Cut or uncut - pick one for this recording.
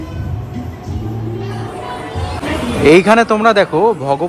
uncut